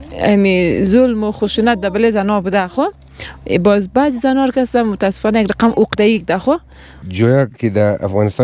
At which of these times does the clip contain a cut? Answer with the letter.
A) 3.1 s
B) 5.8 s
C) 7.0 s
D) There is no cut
C